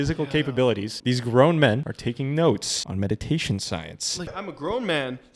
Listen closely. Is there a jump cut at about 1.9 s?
yes; 4 cuts; at 0.9 s, 1.9 s, 2.8 s, 4.3 s

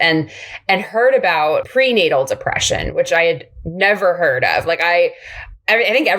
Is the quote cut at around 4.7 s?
no; 1 cut; at 1.7 s

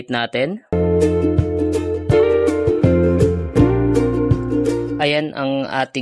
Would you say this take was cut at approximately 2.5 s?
no; 2 cuts; at 0.7 s, 5.0 s

